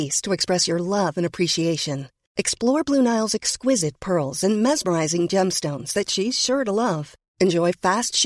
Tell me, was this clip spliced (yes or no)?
no